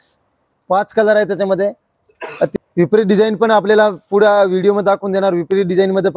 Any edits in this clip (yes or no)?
yes